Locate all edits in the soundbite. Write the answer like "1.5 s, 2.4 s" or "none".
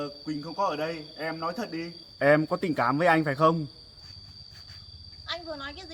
2.0 s, 4.0 s